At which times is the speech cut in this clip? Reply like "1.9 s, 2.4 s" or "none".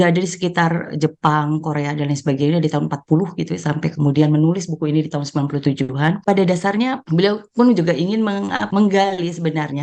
6.2 s, 7.0 s, 8.6 s